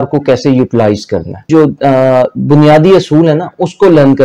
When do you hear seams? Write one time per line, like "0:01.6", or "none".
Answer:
0:01.5